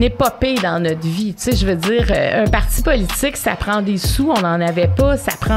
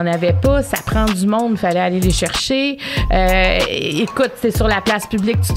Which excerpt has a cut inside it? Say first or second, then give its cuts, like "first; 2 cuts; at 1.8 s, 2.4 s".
first; 1 cut; at 2.1 s